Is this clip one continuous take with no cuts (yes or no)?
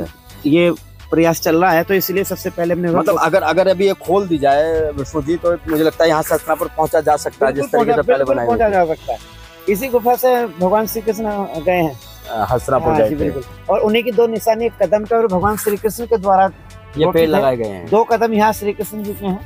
yes